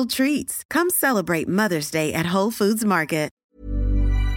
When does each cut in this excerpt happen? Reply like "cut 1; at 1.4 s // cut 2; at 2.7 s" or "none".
cut 1; at 3.4 s